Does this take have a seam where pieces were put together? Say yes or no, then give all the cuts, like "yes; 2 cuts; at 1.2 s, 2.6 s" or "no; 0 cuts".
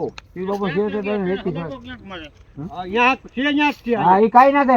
no; 0 cuts